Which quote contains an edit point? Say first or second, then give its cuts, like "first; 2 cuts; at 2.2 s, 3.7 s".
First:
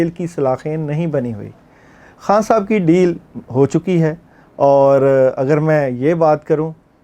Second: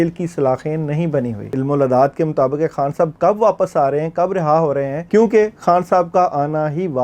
second; 2 cuts; at 1.4 s, 5.0 s